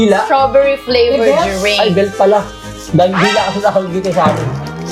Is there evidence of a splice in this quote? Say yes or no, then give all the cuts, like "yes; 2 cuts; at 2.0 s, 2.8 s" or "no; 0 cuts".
no; 0 cuts